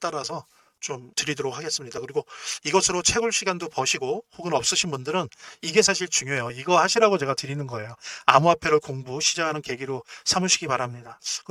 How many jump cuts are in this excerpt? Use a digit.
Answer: 0